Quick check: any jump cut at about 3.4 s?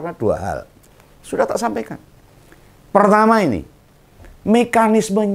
no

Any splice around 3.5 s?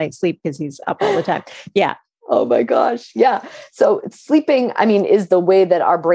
no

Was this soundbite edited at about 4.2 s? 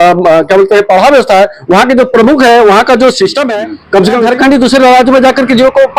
yes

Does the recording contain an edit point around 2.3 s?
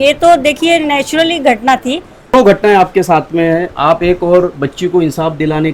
yes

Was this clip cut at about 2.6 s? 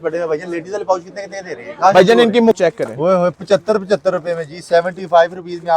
yes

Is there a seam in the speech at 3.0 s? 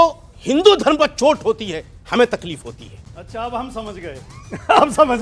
no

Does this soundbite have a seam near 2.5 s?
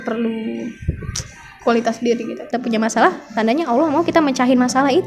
yes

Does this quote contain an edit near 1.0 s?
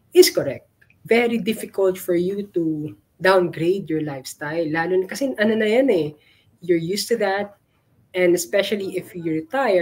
yes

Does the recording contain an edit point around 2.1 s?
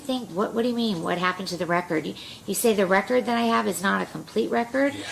no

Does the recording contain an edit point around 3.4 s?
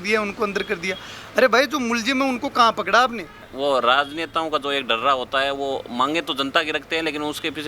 yes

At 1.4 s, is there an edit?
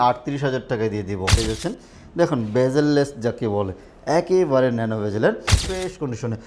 yes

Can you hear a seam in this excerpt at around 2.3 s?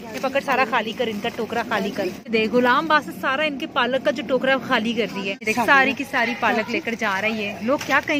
yes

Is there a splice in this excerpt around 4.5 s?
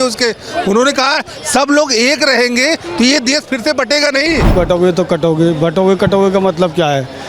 yes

